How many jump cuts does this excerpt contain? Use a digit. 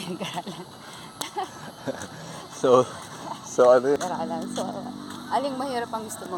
1